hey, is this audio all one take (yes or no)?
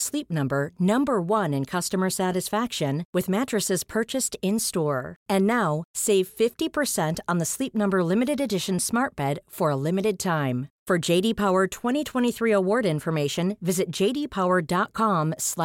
yes